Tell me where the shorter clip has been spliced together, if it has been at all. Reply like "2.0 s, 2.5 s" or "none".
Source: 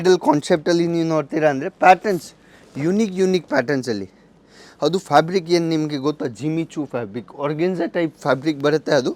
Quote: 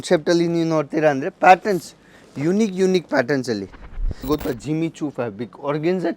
4.2 s

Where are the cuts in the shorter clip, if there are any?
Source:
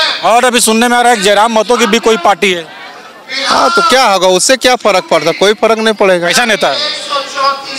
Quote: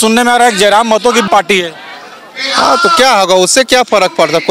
1.2 s

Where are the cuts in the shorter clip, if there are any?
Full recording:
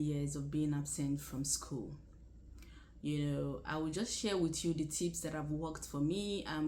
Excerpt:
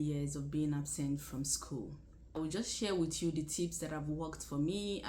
2.3 s

